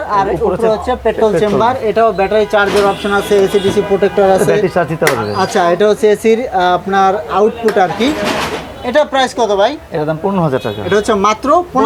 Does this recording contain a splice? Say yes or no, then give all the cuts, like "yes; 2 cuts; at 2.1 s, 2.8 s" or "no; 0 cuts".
no; 0 cuts